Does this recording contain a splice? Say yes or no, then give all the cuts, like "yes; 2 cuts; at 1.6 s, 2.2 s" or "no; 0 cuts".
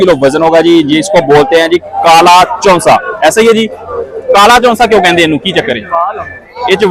no; 0 cuts